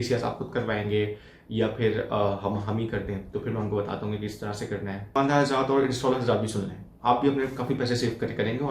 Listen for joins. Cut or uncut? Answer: cut